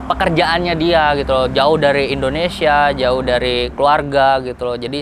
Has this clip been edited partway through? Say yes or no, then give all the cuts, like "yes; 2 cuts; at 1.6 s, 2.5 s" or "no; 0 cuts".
no; 0 cuts